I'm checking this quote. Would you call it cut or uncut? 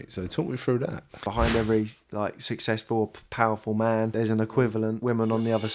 cut